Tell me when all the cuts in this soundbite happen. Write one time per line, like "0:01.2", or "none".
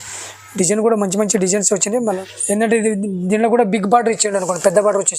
0:02.2